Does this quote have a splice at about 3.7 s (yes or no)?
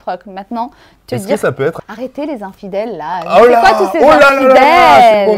no